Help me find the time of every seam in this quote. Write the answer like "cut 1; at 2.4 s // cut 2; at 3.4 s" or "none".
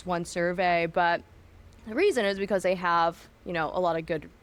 none